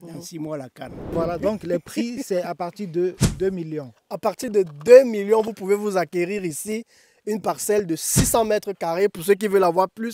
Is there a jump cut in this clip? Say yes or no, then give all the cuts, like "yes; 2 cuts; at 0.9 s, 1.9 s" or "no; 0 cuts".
yes; 1 cut; at 1.0 s